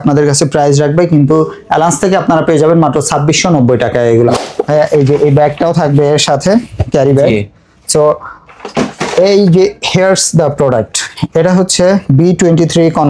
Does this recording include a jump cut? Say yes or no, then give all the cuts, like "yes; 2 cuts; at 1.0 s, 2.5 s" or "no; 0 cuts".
yes; 1 cut; at 4.4 s